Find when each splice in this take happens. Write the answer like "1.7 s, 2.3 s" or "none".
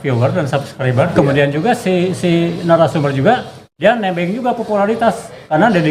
1.1 s